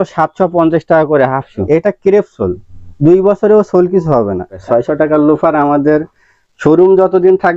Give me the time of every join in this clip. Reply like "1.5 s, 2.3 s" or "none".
1.6 s, 4.5 s